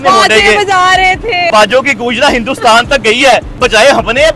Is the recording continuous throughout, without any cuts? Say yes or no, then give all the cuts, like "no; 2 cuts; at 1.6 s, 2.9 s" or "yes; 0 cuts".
no; 2 cuts; at 1.5 s, 3.6 s